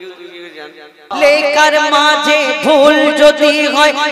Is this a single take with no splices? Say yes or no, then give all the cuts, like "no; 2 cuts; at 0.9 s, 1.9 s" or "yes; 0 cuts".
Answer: no; 1 cut; at 1.1 s